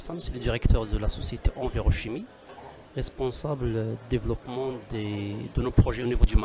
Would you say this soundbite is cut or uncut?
uncut